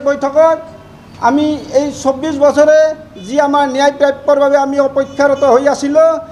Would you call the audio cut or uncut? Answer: uncut